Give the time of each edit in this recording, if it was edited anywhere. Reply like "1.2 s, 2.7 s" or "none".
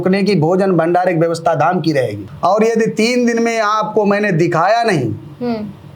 2.2 s